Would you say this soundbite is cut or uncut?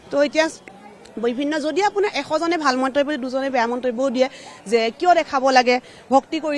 uncut